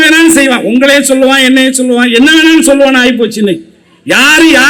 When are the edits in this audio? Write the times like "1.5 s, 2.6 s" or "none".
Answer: none